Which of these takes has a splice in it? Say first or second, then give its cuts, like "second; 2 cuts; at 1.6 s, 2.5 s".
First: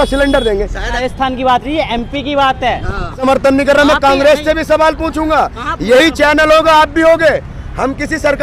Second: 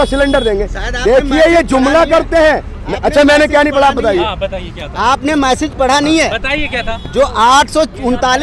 first; 2 cuts; at 0.9 s, 3.2 s